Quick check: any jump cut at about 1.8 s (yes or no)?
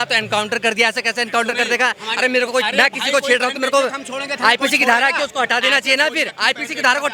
no